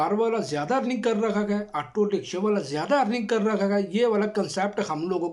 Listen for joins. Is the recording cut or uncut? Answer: uncut